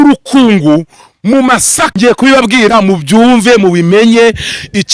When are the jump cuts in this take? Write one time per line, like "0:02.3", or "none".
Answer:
0:01.8